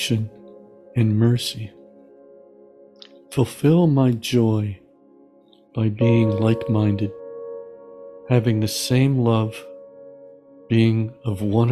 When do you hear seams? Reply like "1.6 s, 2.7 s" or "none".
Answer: none